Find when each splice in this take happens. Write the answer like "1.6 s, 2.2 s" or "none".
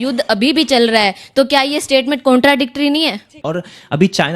3.4 s